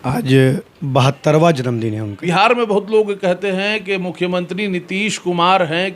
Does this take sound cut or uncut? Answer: cut